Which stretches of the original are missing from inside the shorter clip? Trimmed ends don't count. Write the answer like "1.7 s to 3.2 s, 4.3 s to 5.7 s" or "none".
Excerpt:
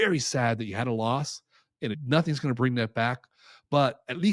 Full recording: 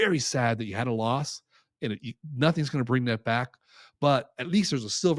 2.0 s to 2.3 s